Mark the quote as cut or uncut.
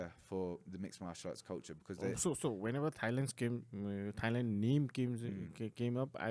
uncut